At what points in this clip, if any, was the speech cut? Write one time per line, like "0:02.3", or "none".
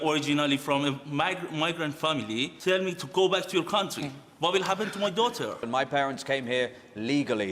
0:02.5
0:05.6